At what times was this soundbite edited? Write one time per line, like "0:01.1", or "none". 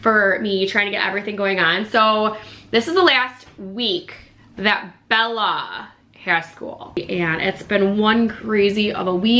0:07.0